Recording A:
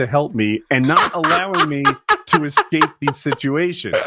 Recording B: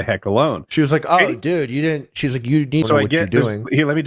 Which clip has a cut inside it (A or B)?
B